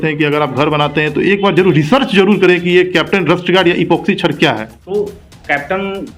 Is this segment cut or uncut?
cut